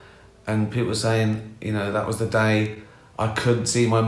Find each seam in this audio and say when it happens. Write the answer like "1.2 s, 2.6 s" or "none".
1.5 s